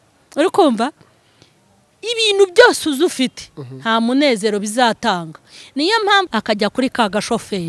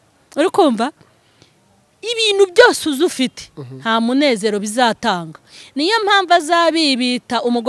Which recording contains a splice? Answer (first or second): first